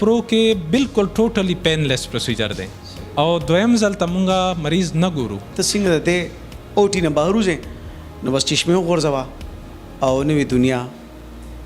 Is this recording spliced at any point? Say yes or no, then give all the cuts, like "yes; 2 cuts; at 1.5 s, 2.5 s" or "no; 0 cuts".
yes; 1 cut; at 5.5 s